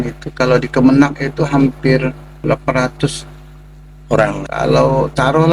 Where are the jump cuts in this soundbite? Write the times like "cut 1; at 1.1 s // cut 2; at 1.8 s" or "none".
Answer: cut 1; at 2.4 s // cut 2; at 4.4 s

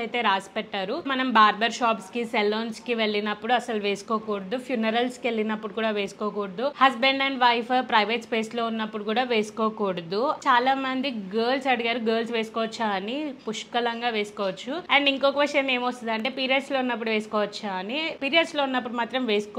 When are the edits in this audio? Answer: none

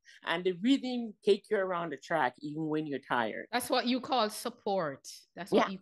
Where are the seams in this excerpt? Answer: cut 1; at 1.2 s

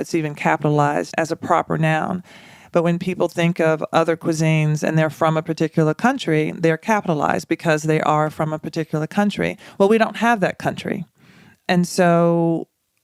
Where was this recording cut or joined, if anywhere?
none

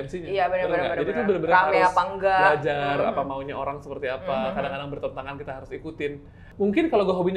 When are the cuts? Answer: none

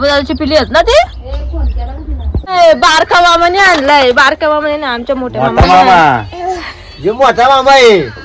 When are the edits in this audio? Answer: cut 1; at 2.6 s

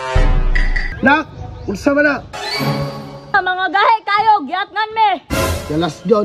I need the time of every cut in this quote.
cut 1; at 0.9 s

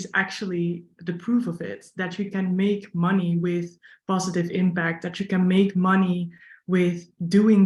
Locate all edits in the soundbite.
none

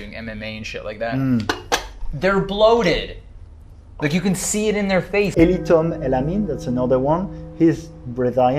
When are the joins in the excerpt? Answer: cut 1; at 5.3 s

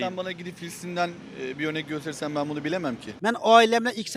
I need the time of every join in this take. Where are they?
cut 1; at 3.1 s

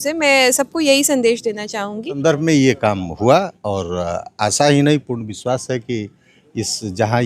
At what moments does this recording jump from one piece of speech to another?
cut 1; at 2.1 s

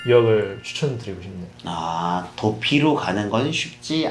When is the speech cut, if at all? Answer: none

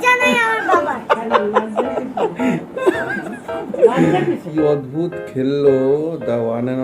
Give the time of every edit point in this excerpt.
cut 1; at 4.5 s

